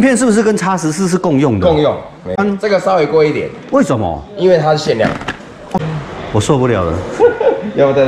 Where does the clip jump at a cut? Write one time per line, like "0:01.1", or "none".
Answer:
0:02.4
0:05.8